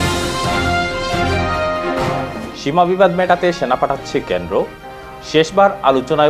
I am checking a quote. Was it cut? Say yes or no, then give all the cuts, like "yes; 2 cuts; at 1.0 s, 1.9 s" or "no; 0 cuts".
yes; 1 cut; at 2.1 s